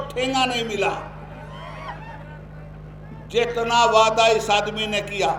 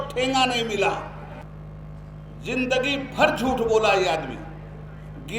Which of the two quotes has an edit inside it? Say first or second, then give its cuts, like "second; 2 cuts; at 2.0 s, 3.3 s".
second; 1 cut; at 1.4 s